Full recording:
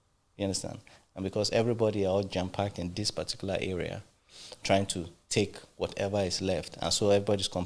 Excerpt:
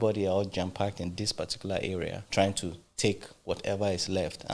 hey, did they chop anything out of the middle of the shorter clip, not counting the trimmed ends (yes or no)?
yes